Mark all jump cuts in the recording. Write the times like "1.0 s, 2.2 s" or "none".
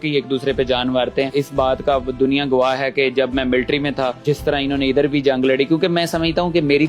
1.3 s, 4.2 s